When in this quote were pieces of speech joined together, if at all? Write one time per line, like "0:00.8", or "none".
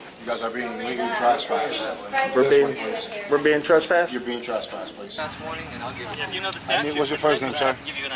0:05.2